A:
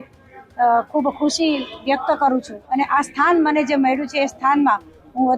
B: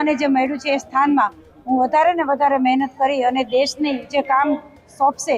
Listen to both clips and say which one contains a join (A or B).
A